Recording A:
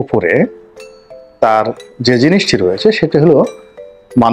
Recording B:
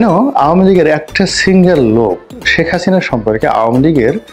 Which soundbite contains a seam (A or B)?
B